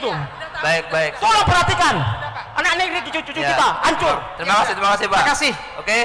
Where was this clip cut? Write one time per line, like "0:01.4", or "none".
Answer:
none